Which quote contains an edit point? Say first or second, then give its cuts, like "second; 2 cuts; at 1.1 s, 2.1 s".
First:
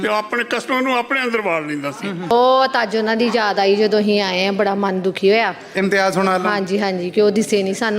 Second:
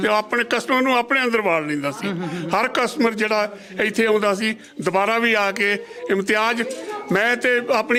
first; 1 cut; at 2.3 s